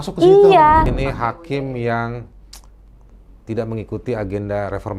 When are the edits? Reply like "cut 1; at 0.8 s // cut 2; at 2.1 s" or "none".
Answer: cut 1; at 0.9 s